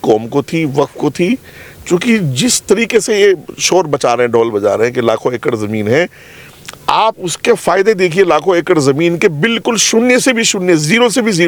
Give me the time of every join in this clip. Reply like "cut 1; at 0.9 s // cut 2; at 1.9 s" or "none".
none